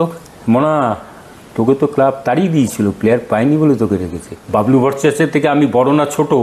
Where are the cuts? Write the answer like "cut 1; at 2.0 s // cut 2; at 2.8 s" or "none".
cut 1; at 4.3 s